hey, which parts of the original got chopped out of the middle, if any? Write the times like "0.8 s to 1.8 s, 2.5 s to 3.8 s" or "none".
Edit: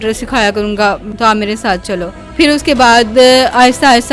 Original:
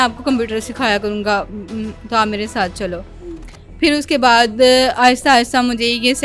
1.6 s to 2.0 s, 3.1 s to 3.6 s